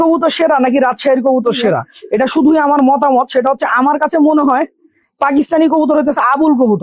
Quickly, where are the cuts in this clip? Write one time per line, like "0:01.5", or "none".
0:01.9